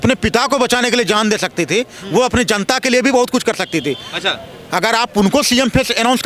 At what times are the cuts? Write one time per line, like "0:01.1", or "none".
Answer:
none